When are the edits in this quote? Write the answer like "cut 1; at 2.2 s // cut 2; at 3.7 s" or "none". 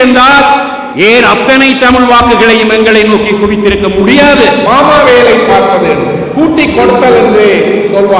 cut 1; at 4.6 s

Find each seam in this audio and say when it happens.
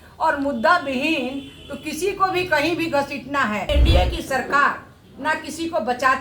cut 1; at 3.7 s

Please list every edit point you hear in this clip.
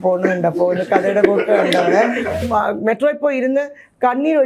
cut 1; at 2.4 s

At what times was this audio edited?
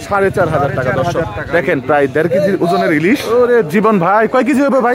cut 1; at 3.2 s

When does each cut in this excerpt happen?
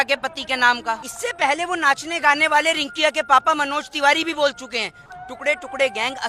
cut 1; at 1.1 s // cut 2; at 5.0 s

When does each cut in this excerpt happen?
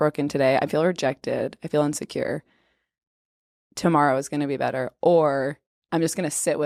none

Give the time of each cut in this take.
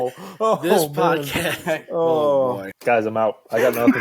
cut 1; at 2.7 s

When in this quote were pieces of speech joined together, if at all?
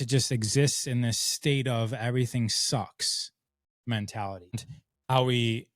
cut 1; at 4.6 s

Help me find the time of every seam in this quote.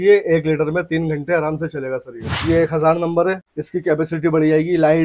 cut 1; at 2.3 s // cut 2; at 3.5 s

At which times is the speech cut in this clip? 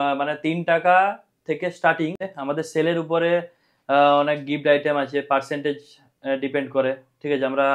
cut 1; at 2.3 s

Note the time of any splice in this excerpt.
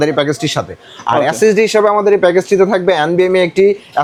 none

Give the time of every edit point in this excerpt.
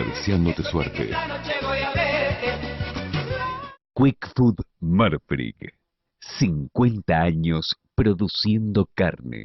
cut 1; at 3.8 s

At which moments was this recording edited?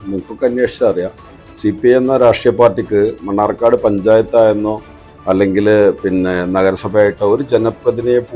none

